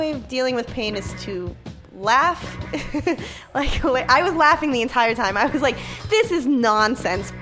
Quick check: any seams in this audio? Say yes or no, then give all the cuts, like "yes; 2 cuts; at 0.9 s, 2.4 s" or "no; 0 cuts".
no; 0 cuts